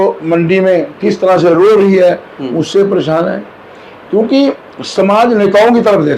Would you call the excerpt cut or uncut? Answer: uncut